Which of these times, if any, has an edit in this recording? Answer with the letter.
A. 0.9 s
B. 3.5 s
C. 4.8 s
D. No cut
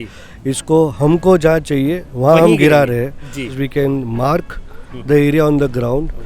B